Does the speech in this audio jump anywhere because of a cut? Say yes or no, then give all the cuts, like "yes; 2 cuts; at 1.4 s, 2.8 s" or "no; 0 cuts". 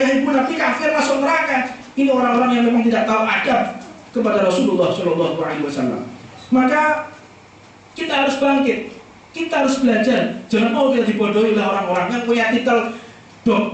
no; 0 cuts